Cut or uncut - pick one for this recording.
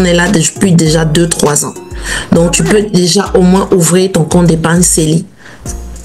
uncut